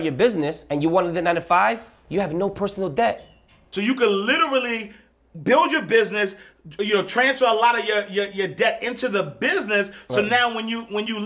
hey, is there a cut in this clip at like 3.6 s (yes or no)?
yes